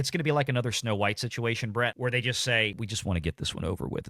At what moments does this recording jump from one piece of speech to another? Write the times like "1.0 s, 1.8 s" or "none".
2.0 s, 2.8 s